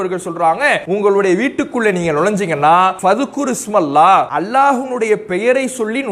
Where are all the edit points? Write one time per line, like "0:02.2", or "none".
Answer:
0:00.8
0:03.0
0:04.3